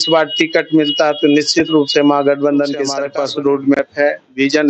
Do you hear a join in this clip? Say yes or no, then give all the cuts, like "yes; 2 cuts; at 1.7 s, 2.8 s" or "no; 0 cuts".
yes; 1 cut; at 3.0 s